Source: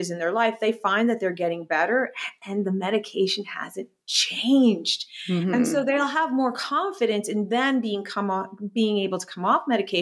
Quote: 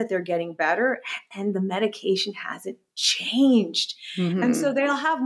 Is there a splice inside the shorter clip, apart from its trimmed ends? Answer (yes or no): no